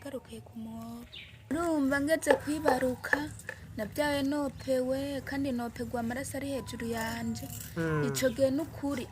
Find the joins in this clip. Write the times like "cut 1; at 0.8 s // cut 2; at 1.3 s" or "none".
cut 1; at 1.5 s